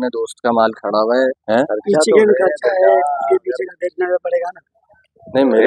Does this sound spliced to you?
yes; 1 cut; at 1.4 s

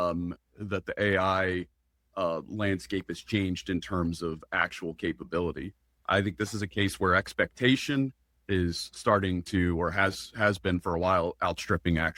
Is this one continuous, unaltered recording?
yes; 0 cuts

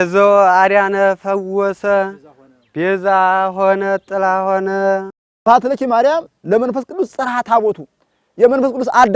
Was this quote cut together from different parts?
yes; 1 cut; at 5.4 s

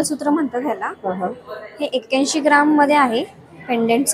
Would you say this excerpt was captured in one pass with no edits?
yes; 0 cuts

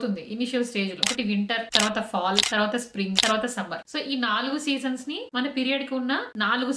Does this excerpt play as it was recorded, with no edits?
no; 1 cut; at 1.0 s

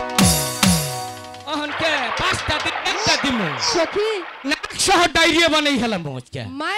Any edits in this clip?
no; 0 cuts

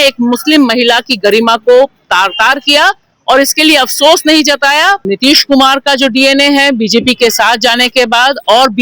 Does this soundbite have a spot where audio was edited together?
yes; 1 cut; at 5.0 s

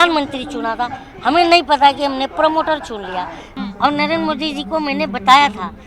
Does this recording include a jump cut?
yes; 1 cut; at 3.5 s

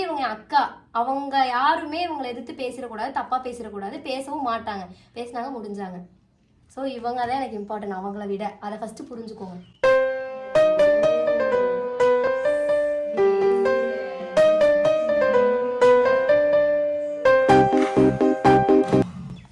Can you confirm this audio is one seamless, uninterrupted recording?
yes; 0 cuts

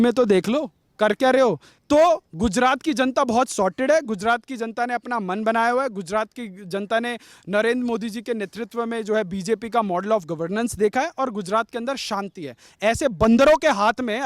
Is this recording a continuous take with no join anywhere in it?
no; 1 cut; at 1.7 s

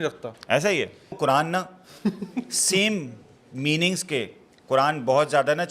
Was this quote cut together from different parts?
yes; 1 cut; at 1.2 s

